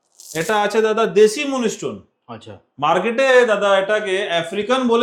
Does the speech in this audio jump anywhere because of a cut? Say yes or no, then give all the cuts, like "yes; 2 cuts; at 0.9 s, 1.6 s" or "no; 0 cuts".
no; 0 cuts